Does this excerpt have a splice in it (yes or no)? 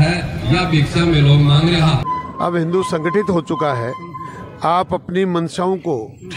yes